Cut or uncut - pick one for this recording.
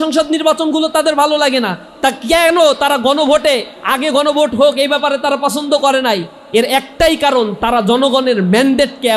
uncut